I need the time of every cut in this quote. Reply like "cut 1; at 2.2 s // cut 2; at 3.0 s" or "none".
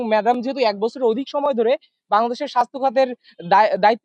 none